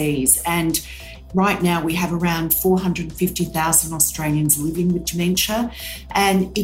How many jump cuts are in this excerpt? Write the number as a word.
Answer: one